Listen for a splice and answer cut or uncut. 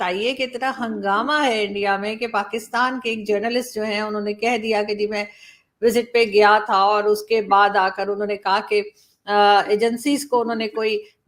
uncut